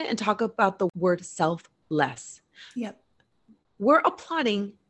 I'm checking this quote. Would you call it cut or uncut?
cut